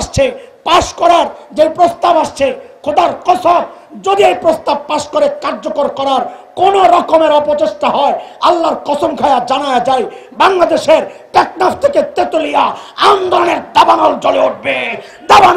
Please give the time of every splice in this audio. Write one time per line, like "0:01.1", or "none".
none